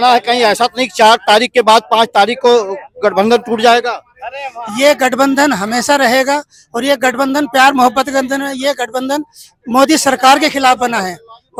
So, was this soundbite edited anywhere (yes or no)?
no